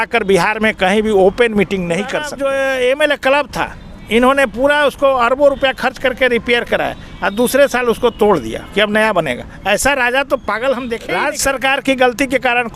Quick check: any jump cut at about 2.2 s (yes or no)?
yes